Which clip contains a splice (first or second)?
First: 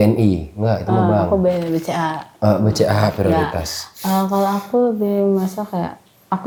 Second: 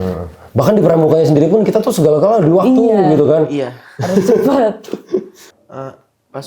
second